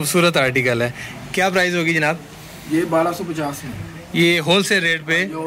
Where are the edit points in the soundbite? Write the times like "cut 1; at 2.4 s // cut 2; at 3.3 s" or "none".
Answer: none